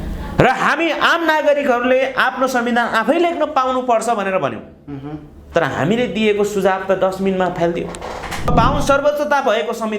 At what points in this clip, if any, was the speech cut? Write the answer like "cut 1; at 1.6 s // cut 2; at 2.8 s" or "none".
cut 1; at 8.5 s